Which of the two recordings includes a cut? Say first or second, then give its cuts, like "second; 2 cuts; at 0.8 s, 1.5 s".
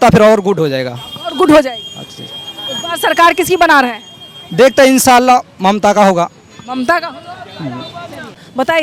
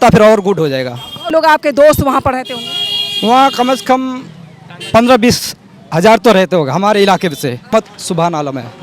second; 2 cuts; at 1.3 s, 7.7 s